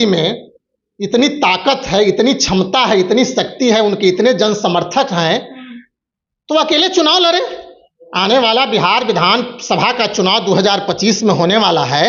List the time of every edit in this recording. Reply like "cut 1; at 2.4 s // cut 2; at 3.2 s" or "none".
none